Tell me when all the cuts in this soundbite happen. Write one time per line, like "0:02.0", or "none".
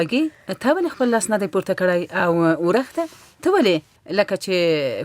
0:04.0